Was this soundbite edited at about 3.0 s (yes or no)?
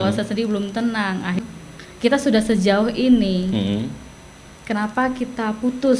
no